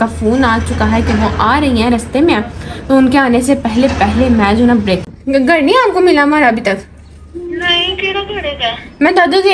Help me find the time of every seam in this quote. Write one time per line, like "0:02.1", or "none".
0:05.0